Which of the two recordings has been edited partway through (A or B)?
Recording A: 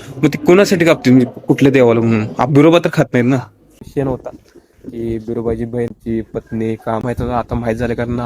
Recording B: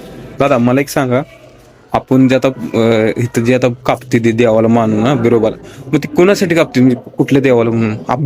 A